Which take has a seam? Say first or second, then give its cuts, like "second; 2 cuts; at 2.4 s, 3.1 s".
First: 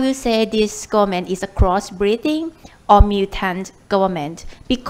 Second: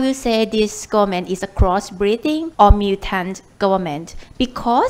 second; 1 cut; at 2.5 s